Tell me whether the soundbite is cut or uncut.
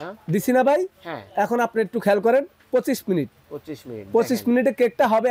uncut